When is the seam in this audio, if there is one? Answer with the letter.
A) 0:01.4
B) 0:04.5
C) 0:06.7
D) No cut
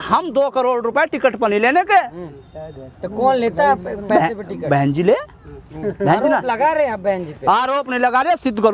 D